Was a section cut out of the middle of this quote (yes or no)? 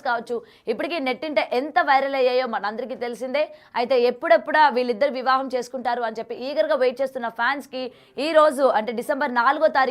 no